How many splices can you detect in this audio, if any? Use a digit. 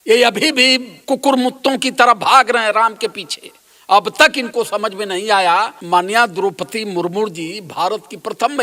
2